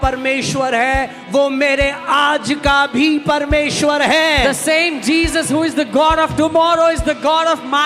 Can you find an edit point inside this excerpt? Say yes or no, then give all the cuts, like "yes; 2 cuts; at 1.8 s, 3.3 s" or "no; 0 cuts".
no; 0 cuts